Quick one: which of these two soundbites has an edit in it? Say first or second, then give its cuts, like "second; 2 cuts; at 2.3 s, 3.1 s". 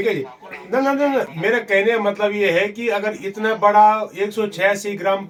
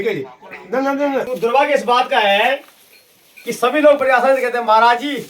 second; 1 cut; at 1.3 s